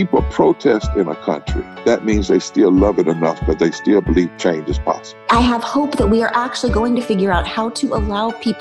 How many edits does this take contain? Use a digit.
1